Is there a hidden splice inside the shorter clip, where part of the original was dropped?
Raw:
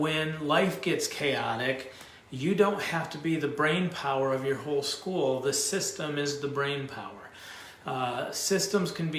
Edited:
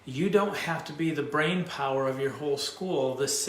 no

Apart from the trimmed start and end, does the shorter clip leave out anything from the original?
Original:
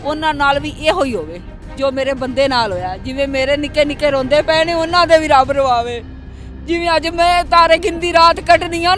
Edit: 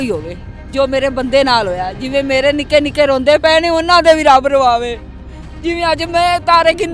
no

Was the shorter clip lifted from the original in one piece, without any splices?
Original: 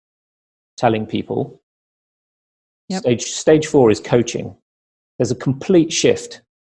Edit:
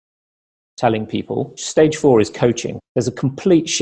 no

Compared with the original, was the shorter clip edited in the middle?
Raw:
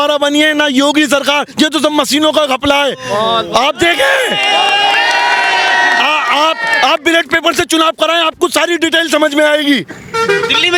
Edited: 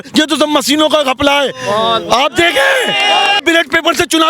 yes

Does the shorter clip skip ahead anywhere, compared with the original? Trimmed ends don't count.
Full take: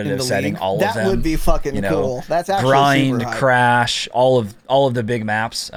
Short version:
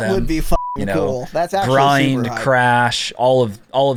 no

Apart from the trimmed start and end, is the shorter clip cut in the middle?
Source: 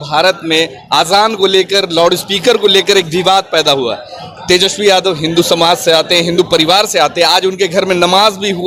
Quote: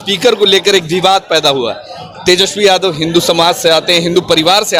no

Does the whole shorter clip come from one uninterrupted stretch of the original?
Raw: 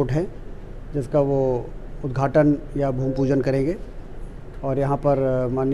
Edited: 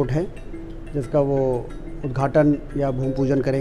yes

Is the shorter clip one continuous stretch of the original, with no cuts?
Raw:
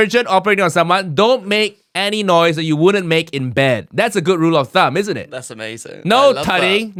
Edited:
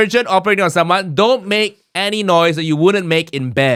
yes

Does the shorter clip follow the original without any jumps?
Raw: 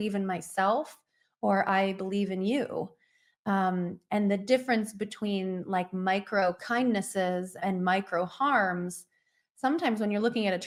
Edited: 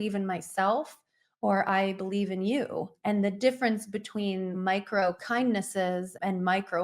no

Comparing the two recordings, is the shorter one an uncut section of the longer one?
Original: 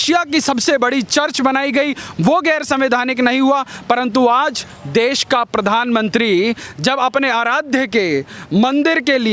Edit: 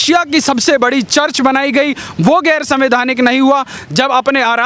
no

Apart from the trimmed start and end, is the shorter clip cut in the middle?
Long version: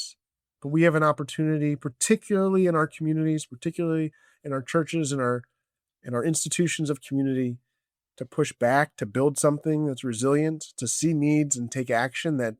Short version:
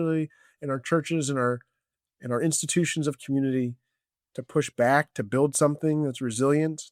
no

